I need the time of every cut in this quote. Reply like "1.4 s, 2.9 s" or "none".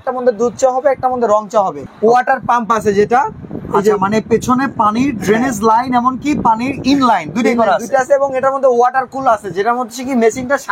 1.8 s